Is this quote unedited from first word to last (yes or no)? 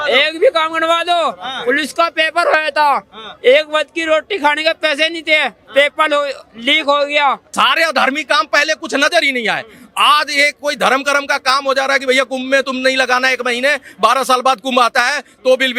no